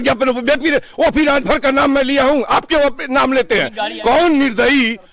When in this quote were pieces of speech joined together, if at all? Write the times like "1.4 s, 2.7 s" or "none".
3.9 s

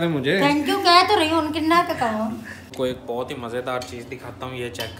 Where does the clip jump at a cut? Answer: 2.7 s

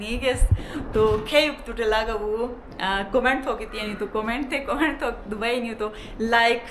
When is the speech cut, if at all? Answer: none

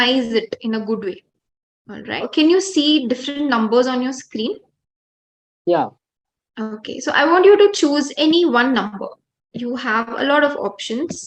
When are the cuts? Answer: 2.2 s

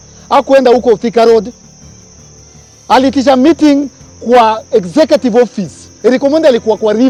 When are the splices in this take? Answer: none

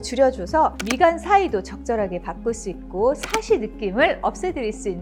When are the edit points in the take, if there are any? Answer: none

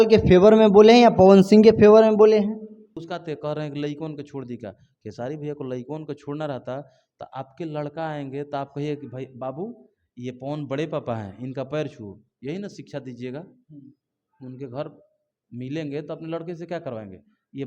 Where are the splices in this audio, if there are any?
3.0 s

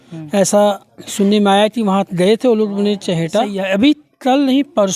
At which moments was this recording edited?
3.6 s

